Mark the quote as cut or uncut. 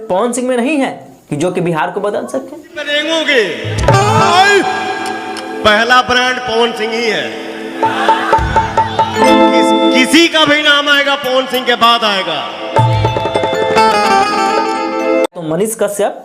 cut